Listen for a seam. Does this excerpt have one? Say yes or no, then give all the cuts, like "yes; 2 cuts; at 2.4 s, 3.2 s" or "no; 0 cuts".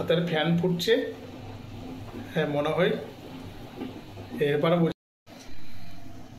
yes; 1 cut; at 4.9 s